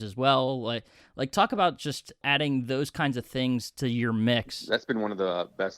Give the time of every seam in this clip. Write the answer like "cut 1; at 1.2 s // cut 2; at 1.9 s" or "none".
cut 1; at 2.2 s // cut 2; at 4.6 s